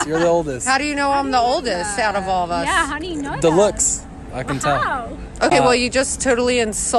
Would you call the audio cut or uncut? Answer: uncut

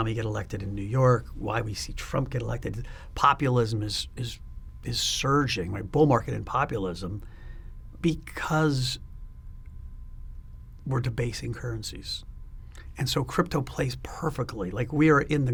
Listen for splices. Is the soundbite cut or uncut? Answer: uncut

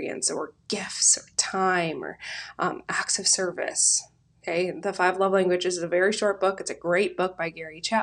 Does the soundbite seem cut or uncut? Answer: uncut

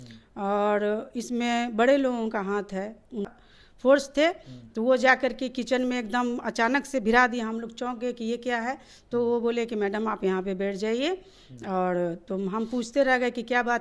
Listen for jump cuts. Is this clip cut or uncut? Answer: cut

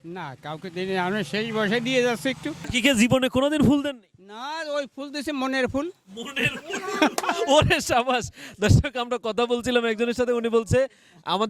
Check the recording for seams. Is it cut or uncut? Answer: cut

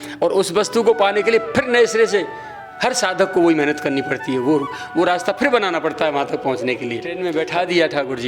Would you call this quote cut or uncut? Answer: cut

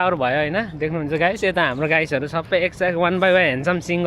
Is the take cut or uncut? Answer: uncut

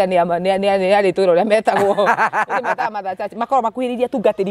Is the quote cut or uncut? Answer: uncut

